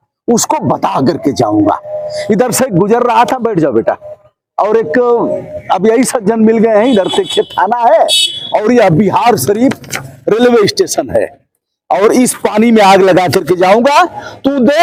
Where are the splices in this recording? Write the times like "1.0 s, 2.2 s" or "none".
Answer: none